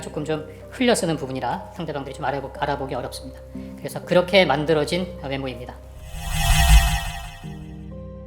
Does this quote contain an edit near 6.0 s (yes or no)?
yes